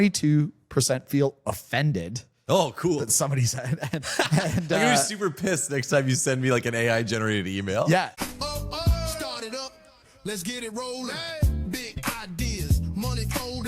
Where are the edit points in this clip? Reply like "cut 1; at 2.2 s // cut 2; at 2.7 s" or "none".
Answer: cut 1; at 8.2 s